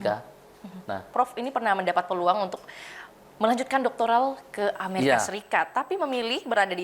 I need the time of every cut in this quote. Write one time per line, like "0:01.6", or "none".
0:01.1

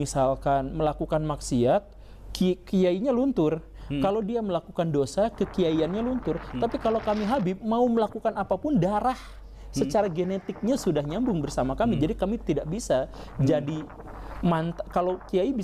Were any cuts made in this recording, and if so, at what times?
none

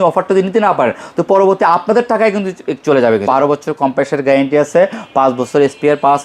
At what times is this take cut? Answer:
0:03.3

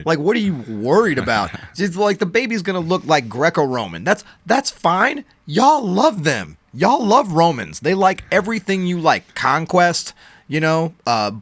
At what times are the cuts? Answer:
none

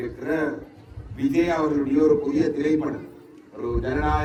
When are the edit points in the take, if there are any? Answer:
none

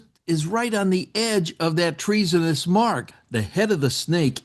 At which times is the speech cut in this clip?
0:03.2

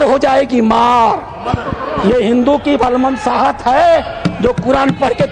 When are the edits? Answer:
none

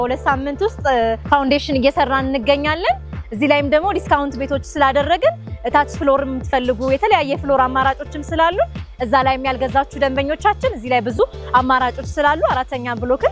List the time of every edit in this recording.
none

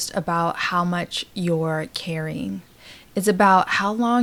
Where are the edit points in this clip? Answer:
none

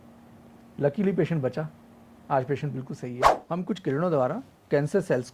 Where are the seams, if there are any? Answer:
0:03.4

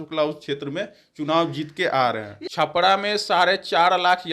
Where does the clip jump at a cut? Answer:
0:02.4

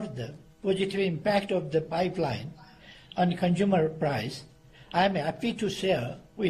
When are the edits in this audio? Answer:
none

